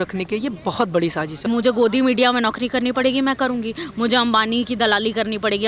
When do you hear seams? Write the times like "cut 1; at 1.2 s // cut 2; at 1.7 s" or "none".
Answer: cut 1; at 1.4 s